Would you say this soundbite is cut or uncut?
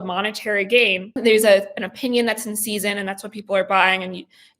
cut